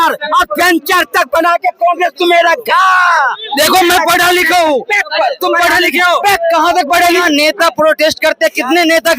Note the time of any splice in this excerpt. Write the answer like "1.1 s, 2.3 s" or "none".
7.2 s